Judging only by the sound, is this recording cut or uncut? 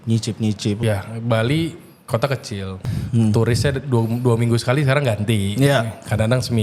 cut